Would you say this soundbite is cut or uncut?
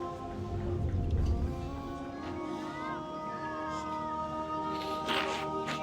uncut